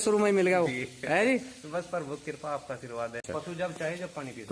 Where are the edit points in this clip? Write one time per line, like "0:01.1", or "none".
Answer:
0:03.2